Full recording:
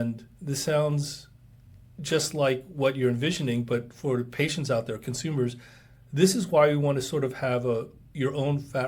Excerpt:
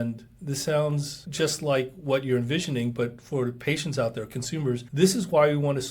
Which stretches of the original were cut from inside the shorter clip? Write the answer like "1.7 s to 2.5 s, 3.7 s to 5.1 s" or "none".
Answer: 1.2 s to 1.9 s, 5.6 s to 6.1 s